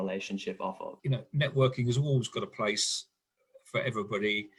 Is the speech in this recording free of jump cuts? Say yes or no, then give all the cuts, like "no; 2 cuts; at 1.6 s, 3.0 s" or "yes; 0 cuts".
yes; 0 cuts